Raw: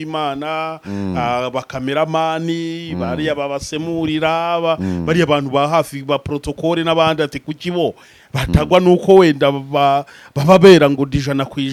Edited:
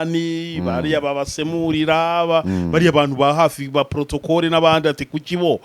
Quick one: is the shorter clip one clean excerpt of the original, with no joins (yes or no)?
yes